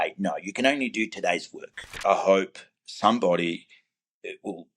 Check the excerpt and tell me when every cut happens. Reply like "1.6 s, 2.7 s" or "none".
2.0 s